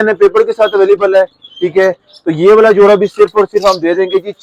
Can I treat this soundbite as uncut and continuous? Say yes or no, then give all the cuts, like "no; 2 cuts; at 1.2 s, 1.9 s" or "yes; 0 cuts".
yes; 0 cuts